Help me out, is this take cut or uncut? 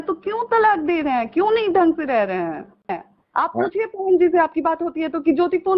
cut